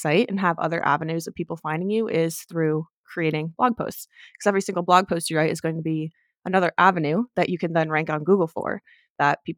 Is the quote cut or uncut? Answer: uncut